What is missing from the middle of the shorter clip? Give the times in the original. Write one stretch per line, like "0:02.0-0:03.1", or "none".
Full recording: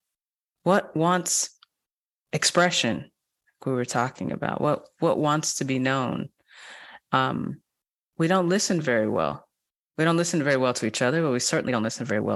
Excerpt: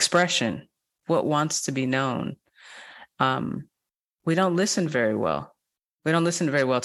0:03.4-0:04.9